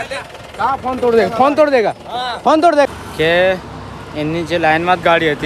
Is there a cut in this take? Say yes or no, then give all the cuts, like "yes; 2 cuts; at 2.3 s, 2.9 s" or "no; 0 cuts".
yes; 1 cut; at 2.9 s